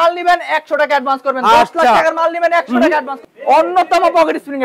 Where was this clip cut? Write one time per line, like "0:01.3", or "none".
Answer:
0:03.2